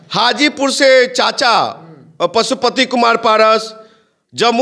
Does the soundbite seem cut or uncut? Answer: uncut